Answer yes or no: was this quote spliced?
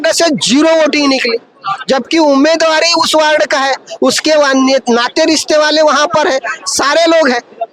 no